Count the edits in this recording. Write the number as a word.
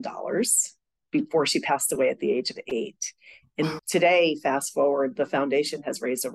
zero